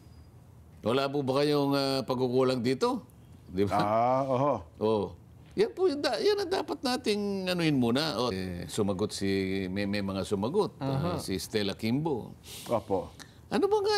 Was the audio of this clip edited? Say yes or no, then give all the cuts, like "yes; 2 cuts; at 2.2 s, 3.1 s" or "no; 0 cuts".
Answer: yes; 1 cut; at 8.3 s